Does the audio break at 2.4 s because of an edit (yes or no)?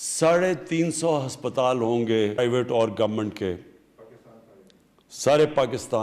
yes